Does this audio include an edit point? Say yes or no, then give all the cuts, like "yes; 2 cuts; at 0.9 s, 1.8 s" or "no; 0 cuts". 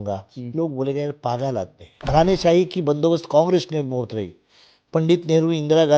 yes; 1 cut; at 2.1 s